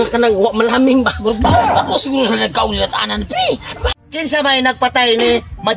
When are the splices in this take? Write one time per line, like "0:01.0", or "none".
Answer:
0:04.0